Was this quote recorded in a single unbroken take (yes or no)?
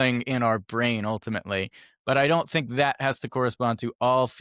yes